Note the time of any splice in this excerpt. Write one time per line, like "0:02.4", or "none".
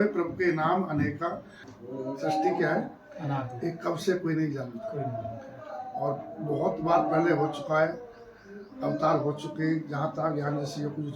0:01.7